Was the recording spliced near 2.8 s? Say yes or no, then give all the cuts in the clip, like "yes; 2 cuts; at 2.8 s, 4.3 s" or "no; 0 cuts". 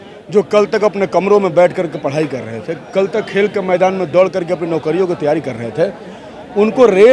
no; 0 cuts